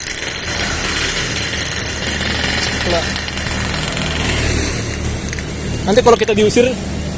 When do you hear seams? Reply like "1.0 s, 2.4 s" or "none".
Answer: none

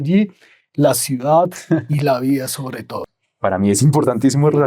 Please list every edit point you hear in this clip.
3.1 s

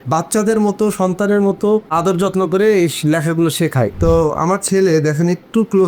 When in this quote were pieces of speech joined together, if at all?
1.9 s, 3.9 s

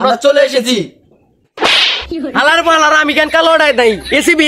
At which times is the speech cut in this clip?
none

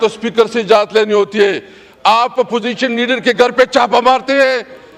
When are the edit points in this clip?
none

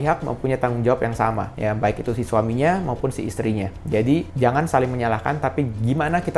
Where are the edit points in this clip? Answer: none

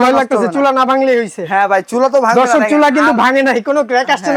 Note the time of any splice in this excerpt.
none

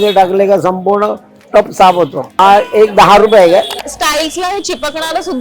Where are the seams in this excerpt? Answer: 2.4 s, 3.7 s

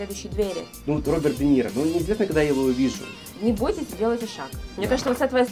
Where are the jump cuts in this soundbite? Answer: 0.8 s, 3.1 s

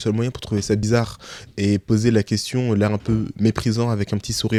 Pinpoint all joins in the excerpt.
none

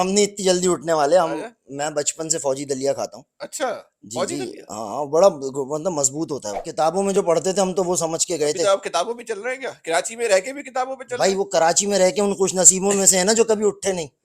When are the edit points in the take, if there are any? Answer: 6.6 s

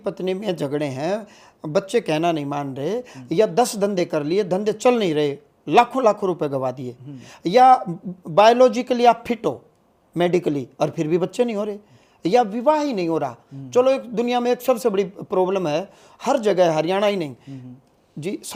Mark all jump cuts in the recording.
none

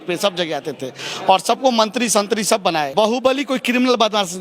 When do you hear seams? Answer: 2.9 s

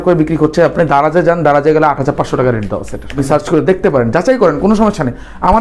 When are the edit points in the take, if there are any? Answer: 3.0 s

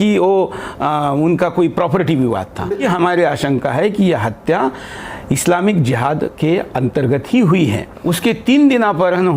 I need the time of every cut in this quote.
2.8 s, 7.9 s

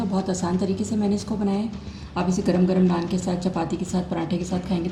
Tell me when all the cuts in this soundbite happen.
none

